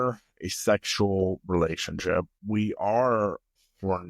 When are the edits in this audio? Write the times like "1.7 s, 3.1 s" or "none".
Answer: 2.4 s